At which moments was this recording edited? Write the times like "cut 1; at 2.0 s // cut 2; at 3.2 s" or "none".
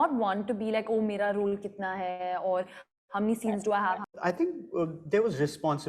cut 1; at 4.1 s